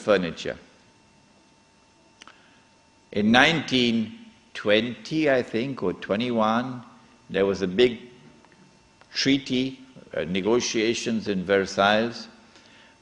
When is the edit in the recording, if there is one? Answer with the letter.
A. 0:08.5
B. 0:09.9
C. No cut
A